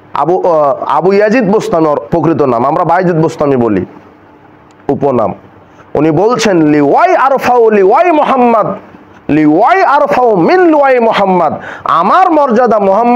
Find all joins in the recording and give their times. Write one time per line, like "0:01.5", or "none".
none